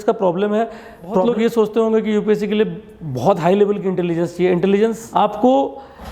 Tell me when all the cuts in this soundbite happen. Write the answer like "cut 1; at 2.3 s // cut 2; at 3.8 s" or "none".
cut 1; at 1.2 s // cut 2; at 5.0 s